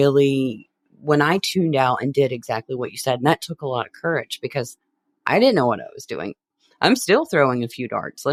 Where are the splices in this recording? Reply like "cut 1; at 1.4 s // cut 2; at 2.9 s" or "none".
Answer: none